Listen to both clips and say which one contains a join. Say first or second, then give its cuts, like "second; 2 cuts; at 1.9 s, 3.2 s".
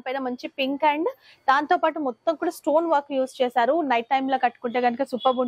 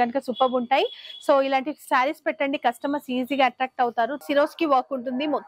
second; 1 cut; at 4.2 s